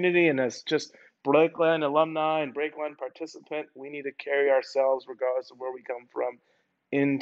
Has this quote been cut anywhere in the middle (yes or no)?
no